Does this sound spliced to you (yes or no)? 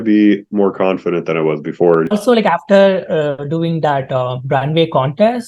yes